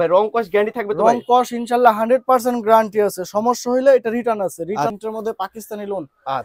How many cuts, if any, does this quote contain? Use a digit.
1